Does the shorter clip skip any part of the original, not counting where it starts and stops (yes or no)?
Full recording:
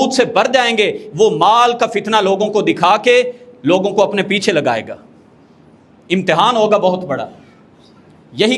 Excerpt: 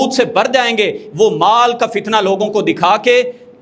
no